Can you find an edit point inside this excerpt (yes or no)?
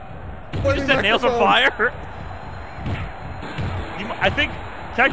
no